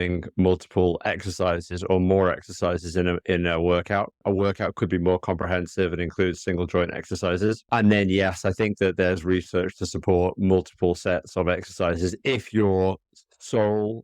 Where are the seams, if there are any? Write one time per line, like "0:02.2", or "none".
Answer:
0:04.2
0:07.7